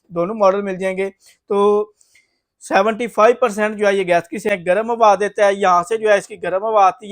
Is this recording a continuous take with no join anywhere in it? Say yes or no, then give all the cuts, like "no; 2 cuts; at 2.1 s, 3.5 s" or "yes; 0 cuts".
no; 1 cut; at 4.5 s